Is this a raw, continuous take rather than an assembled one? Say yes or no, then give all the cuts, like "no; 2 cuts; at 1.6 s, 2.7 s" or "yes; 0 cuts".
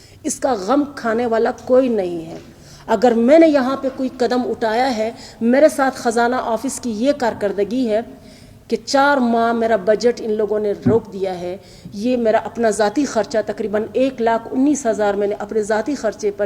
yes; 0 cuts